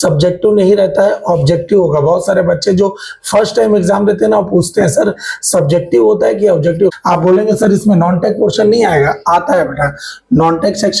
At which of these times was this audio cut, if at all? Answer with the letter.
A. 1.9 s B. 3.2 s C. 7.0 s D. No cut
C